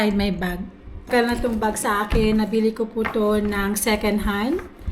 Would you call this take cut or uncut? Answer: cut